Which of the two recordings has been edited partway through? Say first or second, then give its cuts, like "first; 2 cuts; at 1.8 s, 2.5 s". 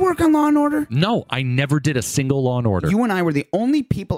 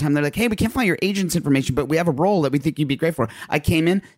first; 2 cuts; at 0.9 s, 2.8 s